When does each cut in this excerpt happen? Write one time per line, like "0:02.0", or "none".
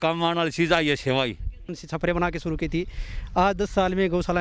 0:01.8